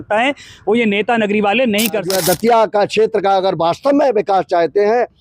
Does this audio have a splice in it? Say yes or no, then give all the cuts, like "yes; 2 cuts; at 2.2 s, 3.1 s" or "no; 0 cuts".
yes; 1 cut; at 2.1 s